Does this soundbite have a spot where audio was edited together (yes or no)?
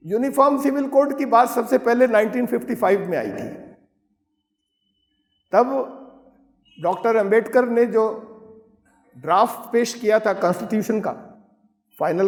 no